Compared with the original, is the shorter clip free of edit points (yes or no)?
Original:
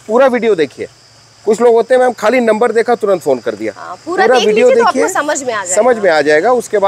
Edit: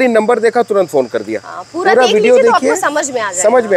yes